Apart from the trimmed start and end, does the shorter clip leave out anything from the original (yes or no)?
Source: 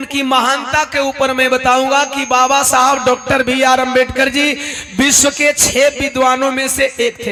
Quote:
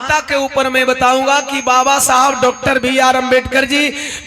no